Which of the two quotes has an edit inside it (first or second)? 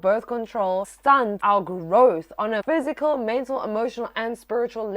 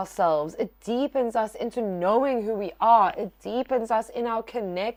first